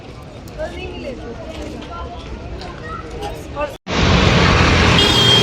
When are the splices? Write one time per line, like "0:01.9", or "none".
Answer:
0:03.8

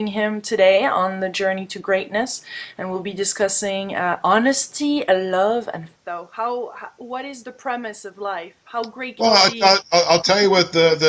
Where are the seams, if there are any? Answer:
none

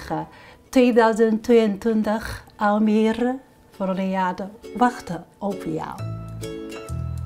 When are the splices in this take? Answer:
0:06.0

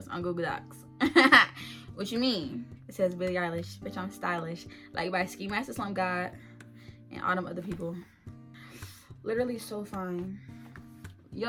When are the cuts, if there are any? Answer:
none

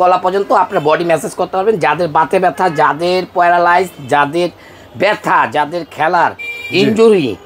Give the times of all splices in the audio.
none

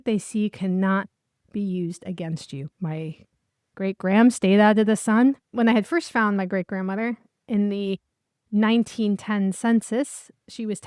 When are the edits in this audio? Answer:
0:02.7
0:05.5

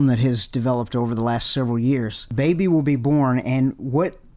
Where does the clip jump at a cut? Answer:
0:02.2

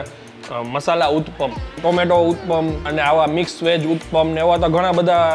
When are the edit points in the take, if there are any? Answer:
0:01.8
0:02.9

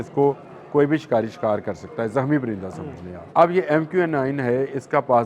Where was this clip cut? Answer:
0:03.1

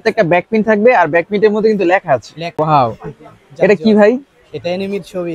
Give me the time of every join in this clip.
0:02.5

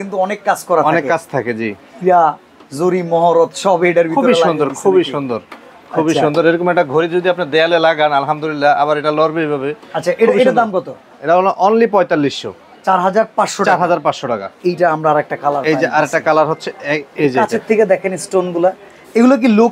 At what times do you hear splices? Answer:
none

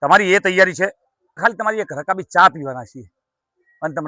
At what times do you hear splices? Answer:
0:01.4

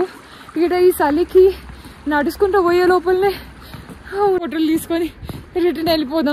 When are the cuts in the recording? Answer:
0:04.4

